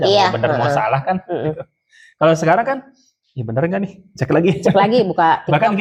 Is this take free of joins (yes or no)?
yes